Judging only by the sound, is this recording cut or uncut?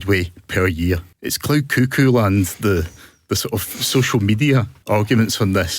uncut